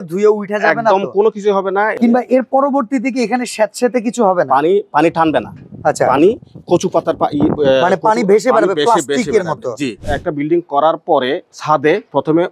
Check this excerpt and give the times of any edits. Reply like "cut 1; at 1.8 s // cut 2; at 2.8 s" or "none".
cut 1; at 1.9 s // cut 2; at 10.1 s